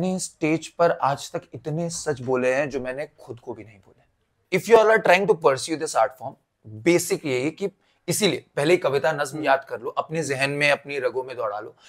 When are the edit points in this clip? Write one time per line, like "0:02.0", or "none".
0:04.4